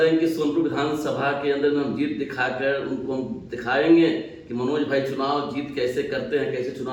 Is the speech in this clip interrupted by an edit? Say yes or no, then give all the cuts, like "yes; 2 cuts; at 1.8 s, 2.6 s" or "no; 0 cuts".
no; 0 cuts